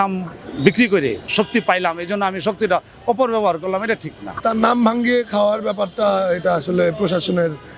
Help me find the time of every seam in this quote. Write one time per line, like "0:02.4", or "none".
0:01.2
0:04.4